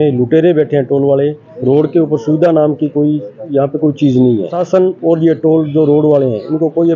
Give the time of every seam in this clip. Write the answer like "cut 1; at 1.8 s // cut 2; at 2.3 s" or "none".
cut 1; at 1.5 s // cut 2; at 4.6 s

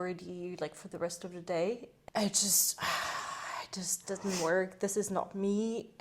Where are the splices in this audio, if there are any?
cut 1; at 1.9 s

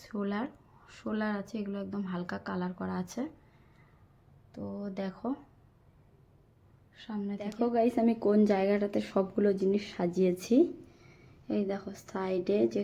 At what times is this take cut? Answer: cut 1; at 7.6 s

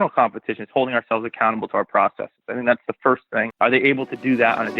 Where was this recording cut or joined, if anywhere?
cut 1; at 3.5 s

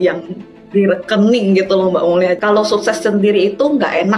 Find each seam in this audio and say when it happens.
cut 1; at 2.4 s

